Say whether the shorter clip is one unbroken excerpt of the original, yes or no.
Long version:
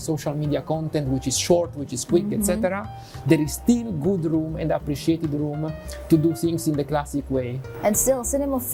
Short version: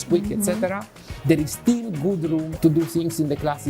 no